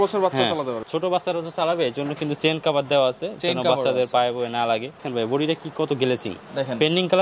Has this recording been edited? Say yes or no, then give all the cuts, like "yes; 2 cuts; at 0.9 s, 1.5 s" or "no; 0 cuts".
yes; 2 cuts; at 0.8 s, 5.0 s